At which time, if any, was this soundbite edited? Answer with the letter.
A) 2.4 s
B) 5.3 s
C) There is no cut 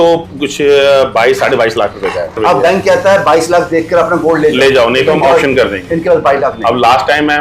A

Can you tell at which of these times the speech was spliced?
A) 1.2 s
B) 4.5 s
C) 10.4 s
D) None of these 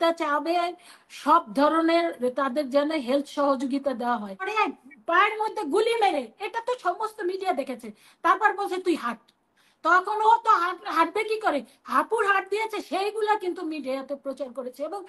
B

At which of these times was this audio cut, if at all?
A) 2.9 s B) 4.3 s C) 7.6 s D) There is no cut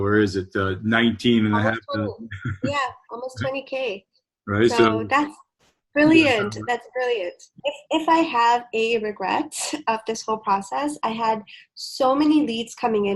C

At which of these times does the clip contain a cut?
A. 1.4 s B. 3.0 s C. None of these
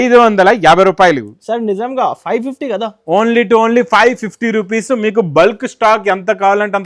C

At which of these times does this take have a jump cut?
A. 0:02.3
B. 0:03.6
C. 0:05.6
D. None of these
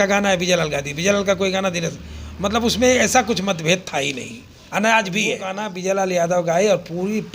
C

